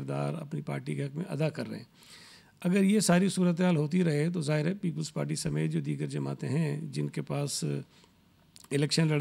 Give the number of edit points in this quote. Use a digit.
0